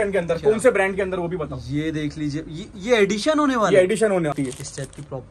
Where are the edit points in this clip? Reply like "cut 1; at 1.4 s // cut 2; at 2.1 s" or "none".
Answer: cut 1; at 4.4 s

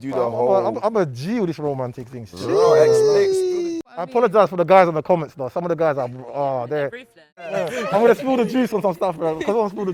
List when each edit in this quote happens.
cut 1; at 3.8 s // cut 2; at 7.4 s

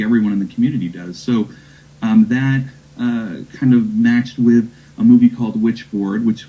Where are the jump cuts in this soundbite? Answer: none

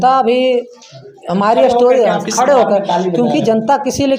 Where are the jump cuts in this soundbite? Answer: none

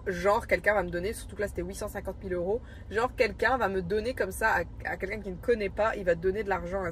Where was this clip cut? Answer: none

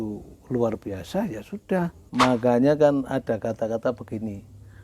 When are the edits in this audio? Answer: cut 1; at 2.0 s

